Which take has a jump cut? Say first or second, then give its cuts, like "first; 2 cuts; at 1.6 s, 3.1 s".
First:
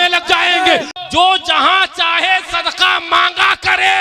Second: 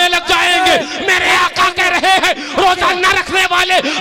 first; 1 cut; at 0.9 s